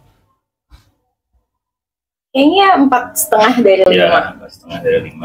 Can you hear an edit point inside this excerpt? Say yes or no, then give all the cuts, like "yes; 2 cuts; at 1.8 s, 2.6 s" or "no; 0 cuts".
no; 0 cuts